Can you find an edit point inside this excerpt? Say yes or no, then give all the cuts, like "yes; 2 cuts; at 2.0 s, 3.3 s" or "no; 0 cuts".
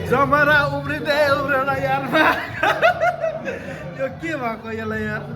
no; 0 cuts